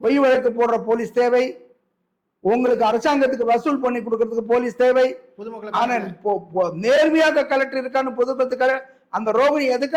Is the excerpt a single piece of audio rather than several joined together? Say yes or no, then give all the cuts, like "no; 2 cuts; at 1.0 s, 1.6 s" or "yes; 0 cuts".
yes; 0 cuts